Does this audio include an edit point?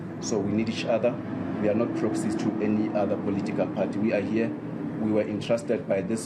no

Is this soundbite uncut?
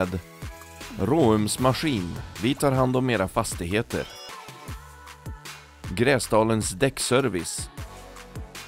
no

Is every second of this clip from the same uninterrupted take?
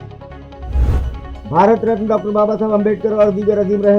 yes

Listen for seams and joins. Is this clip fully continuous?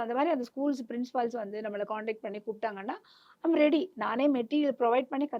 yes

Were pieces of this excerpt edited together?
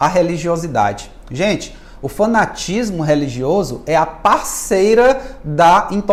no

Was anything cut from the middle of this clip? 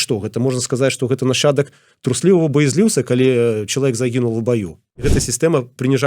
yes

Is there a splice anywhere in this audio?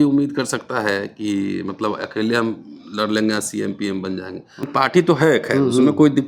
yes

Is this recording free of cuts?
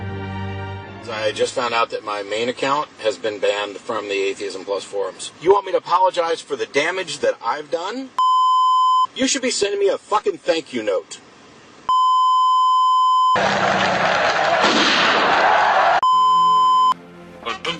no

